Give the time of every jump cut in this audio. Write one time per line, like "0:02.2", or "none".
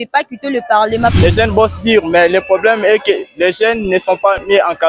0:01.1

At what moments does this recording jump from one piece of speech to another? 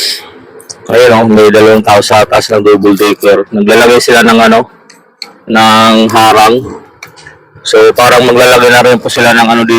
none

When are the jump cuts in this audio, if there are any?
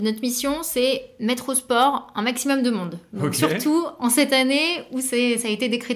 none

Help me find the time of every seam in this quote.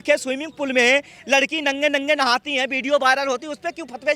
none

